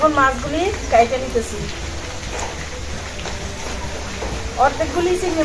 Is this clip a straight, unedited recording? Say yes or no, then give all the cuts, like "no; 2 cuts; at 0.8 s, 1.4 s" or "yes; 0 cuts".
yes; 0 cuts